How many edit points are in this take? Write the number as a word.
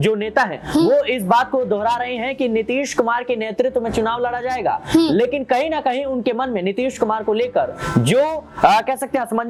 zero